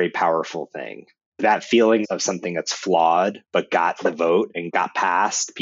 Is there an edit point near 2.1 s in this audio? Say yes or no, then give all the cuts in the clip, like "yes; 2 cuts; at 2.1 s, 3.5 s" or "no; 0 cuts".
yes; 3 cuts; at 1.4 s, 2.1 s, 4.7 s